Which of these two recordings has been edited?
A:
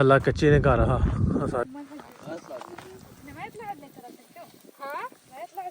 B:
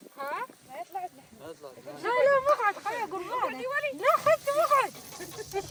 A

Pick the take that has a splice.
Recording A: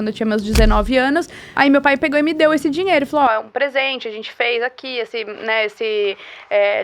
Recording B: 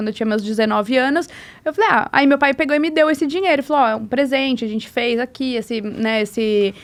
A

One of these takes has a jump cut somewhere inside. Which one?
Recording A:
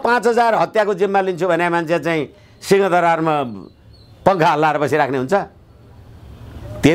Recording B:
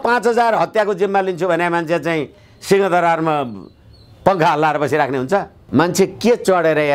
B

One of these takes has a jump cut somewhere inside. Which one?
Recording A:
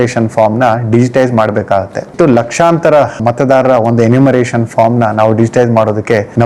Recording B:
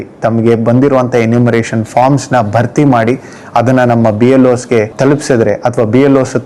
A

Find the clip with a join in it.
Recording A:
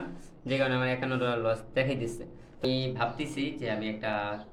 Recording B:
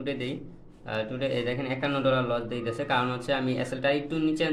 A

